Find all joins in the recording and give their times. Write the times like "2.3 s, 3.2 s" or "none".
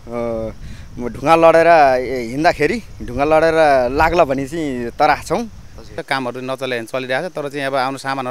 6.0 s

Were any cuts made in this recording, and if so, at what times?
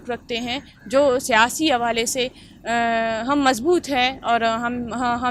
none

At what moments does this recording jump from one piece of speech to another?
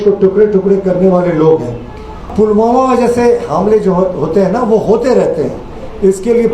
2.3 s

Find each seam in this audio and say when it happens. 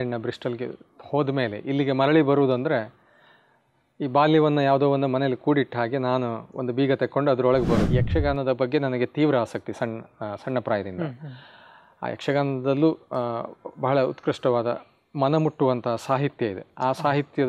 7.9 s

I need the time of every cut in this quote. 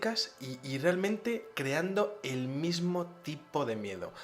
2.8 s

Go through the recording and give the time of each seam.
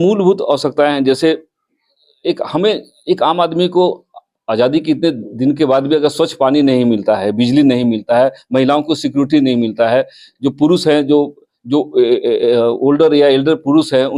none

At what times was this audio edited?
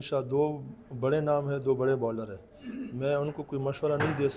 none

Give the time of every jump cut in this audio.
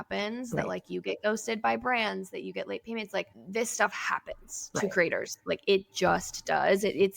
3.4 s

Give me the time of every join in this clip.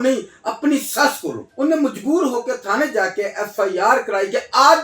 1.5 s

